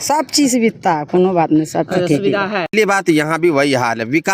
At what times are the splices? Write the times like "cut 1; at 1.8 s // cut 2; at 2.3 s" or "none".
cut 1; at 2.7 s